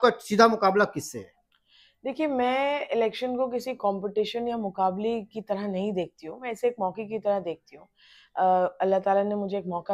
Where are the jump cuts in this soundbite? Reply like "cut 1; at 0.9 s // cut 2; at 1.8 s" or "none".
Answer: none